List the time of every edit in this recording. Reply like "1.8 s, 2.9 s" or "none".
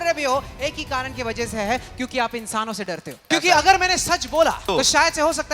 3.2 s, 4.6 s